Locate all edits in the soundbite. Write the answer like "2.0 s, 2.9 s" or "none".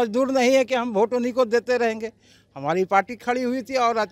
none